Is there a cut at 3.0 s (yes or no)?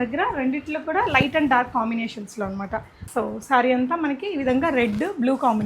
yes